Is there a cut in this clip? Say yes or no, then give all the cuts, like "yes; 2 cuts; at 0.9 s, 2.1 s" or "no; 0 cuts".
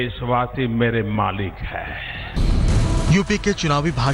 yes; 1 cut; at 2.4 s